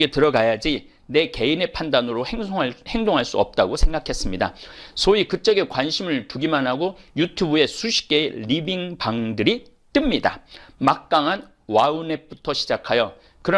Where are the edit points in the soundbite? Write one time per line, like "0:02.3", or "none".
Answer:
none